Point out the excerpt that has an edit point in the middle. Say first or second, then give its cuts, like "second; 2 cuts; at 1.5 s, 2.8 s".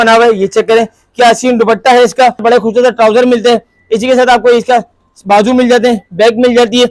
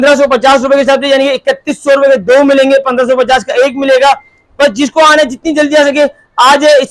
first; 1 cut; at 2.4 s